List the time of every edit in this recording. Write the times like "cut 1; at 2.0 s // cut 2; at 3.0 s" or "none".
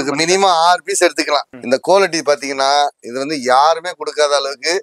cut 1; at 1.5 s